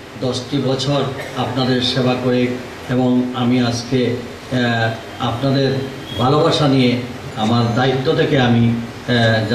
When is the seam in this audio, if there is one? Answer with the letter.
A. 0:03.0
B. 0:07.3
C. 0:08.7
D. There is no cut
B